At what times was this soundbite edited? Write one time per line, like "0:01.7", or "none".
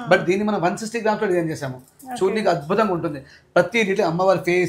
none

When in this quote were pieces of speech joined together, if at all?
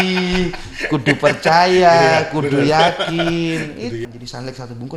0:04.0

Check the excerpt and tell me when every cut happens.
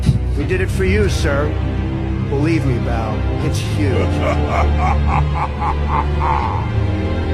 none

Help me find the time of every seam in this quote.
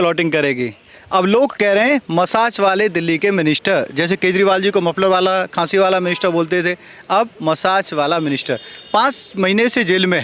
none

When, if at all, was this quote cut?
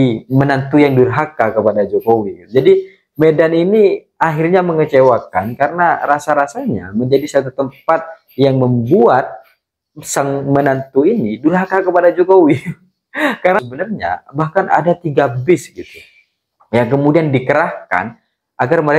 0:13.6

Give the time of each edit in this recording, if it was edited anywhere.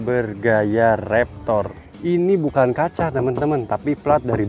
0:01.8

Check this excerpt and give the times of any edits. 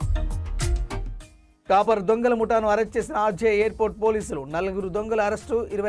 0:00.9

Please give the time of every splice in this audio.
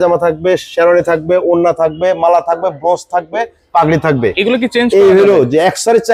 none

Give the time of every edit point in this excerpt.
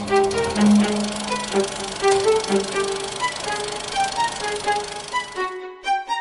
none

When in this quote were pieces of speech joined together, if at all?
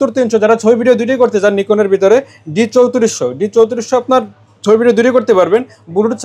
none

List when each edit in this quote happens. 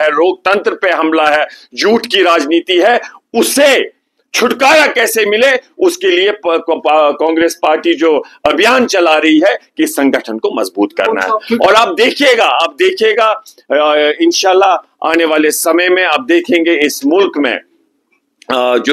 0:10.7

